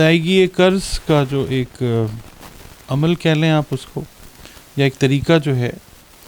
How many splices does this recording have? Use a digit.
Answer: 0